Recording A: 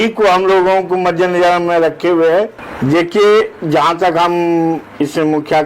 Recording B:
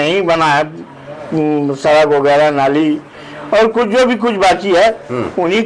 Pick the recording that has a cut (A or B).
A